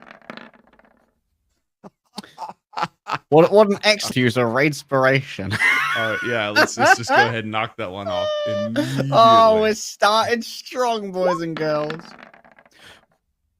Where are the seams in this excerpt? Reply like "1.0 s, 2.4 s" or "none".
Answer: 4.1 s